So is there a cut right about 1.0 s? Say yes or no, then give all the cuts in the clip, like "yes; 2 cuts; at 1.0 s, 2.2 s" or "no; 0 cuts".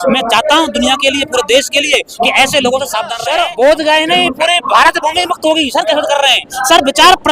no; 1 cut; at 3.2 s